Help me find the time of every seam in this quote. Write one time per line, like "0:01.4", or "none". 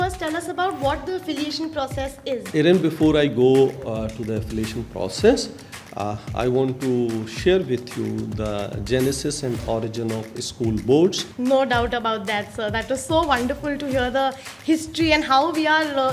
0:02.5
0:11.3